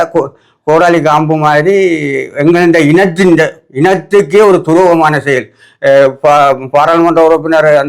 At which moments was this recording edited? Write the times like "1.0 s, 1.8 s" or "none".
none